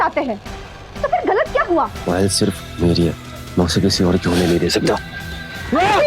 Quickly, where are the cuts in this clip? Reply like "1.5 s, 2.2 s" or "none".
2.0 s